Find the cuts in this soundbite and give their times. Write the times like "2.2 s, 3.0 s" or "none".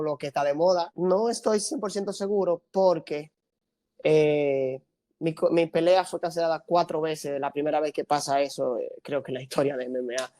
0.9 s